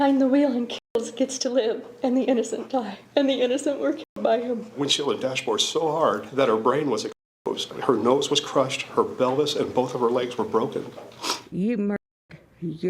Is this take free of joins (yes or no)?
no